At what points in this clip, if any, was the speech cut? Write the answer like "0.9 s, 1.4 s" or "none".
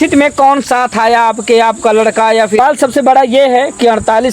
2.6 s